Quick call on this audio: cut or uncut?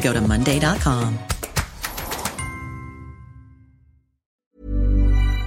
cut